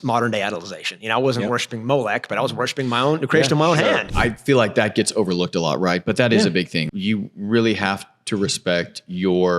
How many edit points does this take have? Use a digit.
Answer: 2